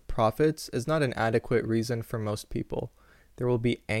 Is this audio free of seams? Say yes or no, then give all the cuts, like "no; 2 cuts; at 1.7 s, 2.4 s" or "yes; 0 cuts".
yes; 0 cuts